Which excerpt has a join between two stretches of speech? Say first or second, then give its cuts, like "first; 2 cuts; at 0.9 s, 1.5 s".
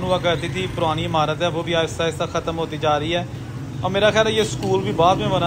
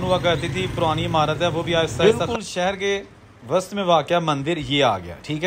second; 1 cut; at 1.9 s